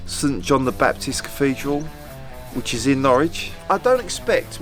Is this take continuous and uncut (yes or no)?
no